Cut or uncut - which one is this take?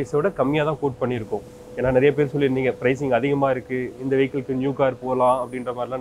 uncut